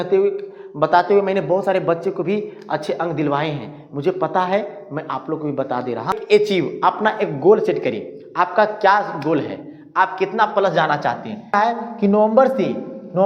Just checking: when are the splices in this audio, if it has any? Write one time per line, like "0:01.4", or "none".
0:06.2
0:11.5